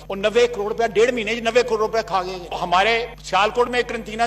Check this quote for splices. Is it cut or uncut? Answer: cut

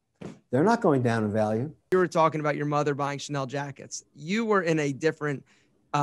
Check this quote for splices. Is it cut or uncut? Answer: cut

